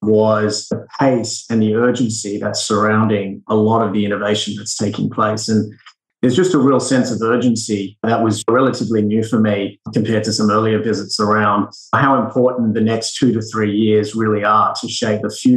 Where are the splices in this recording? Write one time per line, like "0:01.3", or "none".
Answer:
0:06.0